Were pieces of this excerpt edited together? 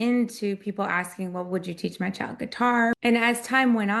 yes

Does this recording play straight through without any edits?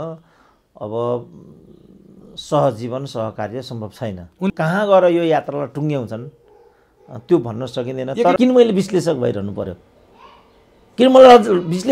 no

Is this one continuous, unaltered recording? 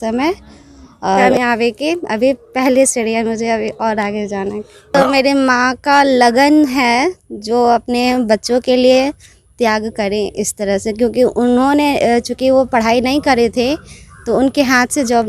no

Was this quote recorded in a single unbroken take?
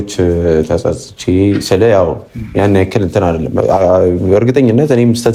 yes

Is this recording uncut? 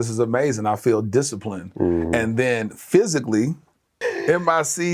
no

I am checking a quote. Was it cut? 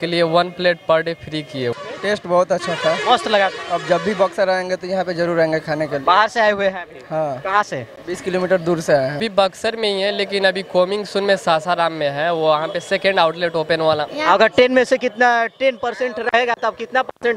yes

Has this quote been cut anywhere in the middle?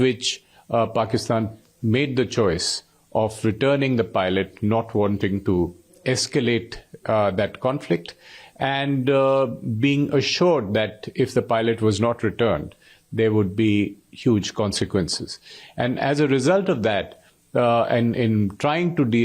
no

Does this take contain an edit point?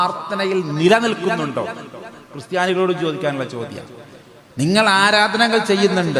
no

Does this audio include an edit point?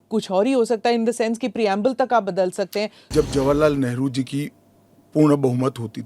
yes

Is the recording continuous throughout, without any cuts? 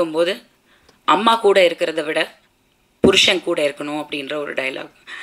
yes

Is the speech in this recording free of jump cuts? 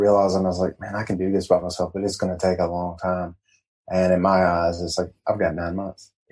yes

